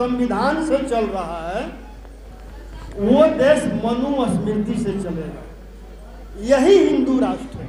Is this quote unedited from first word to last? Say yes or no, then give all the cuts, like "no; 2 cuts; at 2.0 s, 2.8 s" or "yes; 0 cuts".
yes; 0 cuts